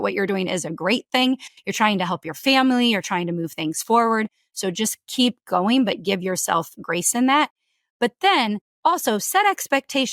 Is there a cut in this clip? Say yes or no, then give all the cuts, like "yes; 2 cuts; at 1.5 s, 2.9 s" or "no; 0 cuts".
no; 0 cuts